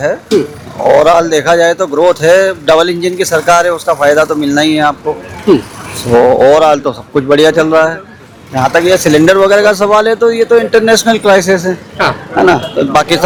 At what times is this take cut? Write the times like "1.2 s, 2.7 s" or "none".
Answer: none